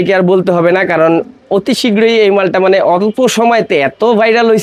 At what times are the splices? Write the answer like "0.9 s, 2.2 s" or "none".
none

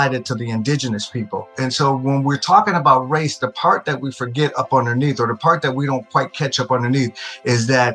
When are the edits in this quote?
1.5 s

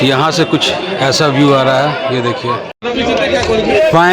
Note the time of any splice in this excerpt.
2.7 s

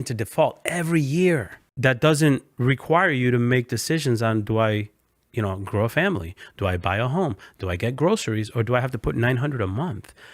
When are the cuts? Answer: 1.6 s, 2.5 s

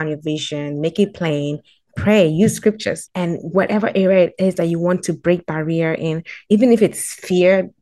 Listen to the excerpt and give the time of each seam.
3.0 s

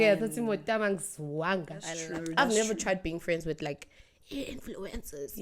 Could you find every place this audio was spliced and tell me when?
2.0 s

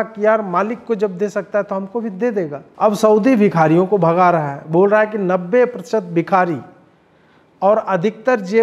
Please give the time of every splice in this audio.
2.6 s

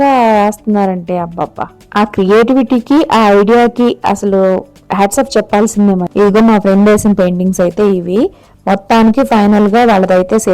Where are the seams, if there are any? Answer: 6.1 s

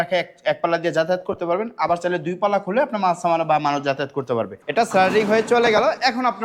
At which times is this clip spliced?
4.6 s

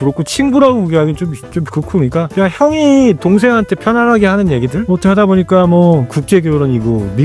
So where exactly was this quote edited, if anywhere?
2.3 s, 4.8 s, 6.1 s

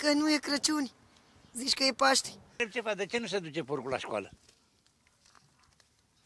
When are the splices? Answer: 2.6 s

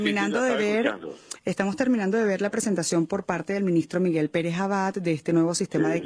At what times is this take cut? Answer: 4.9 s

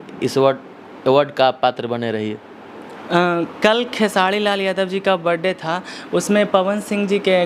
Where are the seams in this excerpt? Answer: none

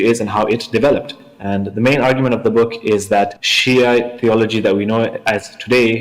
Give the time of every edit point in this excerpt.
1.2 s, 3.5 s

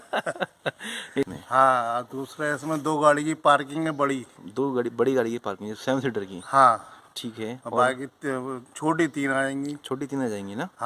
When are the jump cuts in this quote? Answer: 1.3 s

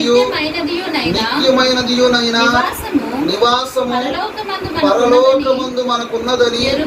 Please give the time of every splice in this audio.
none

